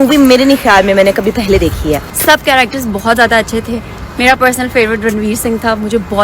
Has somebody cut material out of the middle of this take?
yes; 1 cut; at 2.1 s

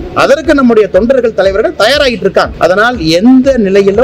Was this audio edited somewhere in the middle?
yes; 1 cut; at 2.5 s

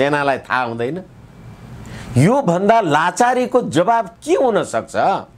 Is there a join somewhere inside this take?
no; 0 cuts

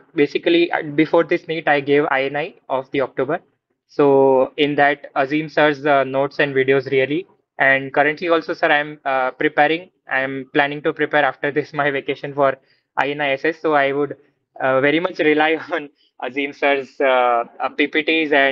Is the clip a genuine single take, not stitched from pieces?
yes; 0 cuts

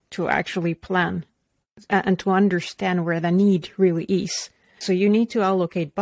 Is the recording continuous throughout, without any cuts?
no; 1 cut; at 4.8 s

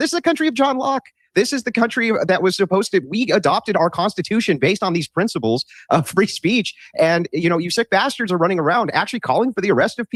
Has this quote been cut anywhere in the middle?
no; 0 cuts

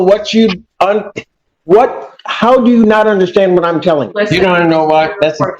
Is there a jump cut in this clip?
yes; 1 cut; at 4.1 s

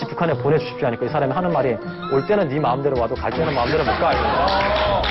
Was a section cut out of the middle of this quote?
no; 0 cuts

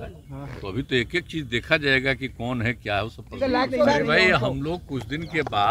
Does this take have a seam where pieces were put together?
yes; 1 cut; at 3.9 s

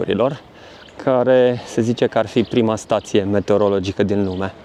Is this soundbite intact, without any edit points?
yes; 0 cuts

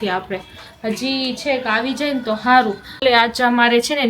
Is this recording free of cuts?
no; 1 cut; at 3.0 s

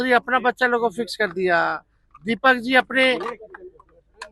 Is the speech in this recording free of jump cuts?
yes; 0 cuts

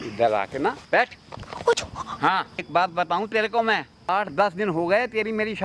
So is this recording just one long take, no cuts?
no; 3 cuts; at 0.9 s, 2.6 s, 3.9 s

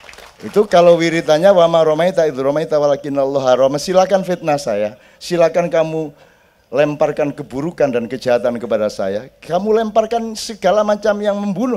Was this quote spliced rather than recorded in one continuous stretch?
no; 0 cuts

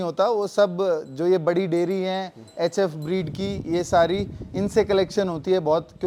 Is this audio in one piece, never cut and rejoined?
yes; 0 cuts

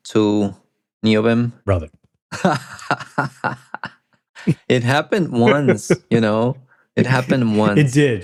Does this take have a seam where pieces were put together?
no; 0 cuts

